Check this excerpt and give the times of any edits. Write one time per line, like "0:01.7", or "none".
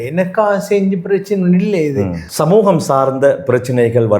0:02.3